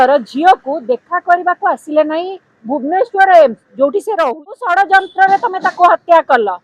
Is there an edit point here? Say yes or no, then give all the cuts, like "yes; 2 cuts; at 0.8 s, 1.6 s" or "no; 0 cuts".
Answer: yes; 1 cut; at 4.6 s